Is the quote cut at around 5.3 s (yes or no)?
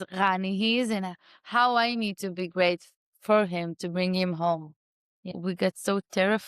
yes